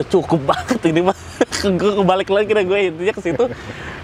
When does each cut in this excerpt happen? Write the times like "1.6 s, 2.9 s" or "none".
none